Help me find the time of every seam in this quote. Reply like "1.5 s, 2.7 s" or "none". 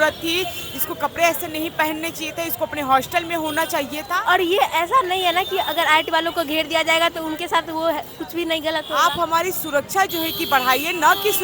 4.0 s, 8.9 s